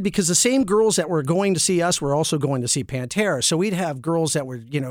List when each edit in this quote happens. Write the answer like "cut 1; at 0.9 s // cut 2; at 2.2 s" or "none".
none